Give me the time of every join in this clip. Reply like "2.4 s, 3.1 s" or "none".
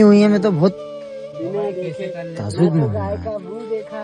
none